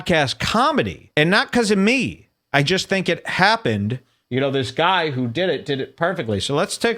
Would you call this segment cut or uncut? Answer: cut